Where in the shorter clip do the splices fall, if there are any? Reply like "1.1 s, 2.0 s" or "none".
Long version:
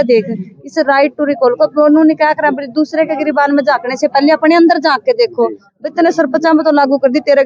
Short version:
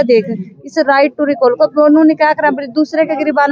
none